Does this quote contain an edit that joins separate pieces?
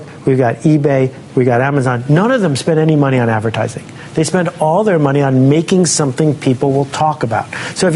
no; 0 cuts

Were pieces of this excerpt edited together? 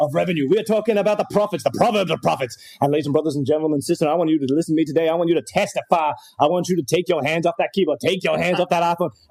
yes; 1 cut; at 1.6 s

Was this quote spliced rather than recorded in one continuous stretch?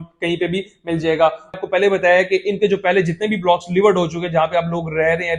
yes; 1 cut; at 1.6 s

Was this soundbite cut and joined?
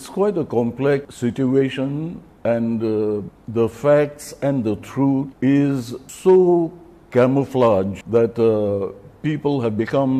yes; 6 cuts; at 1.1 s, 2.2 s, 3.4 s, 5.3 s, 6.0 s, 8.0 s

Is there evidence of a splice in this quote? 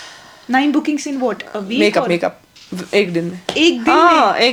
no; 0 cuts

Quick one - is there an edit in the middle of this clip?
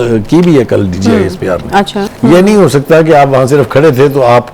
yes; 1 cut; at 2.1 s

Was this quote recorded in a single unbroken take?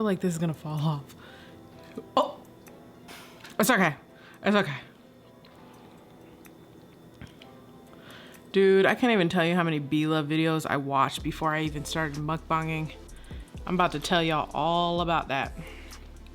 no; 1 cut; at 3.1 s

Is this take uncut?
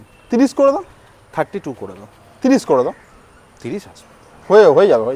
yes; 0 cuts

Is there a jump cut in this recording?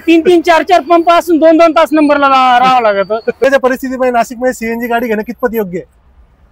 yes; 1 cut; at 3.4 s

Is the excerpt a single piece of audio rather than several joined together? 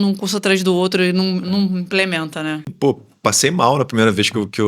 no; 1 cut; at 2.7 s

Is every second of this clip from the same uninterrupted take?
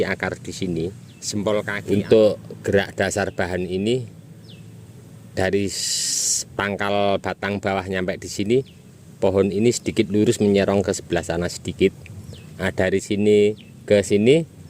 no; 1 cut; at 1.7 s

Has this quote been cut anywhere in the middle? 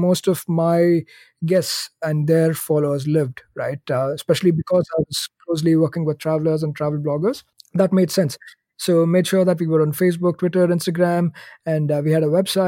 yes; 1 cut; at 7.5 s

